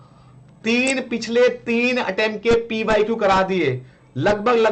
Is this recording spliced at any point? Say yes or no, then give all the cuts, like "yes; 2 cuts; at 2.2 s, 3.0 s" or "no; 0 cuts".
no; 0 cuts